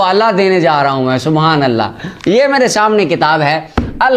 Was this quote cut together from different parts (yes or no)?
no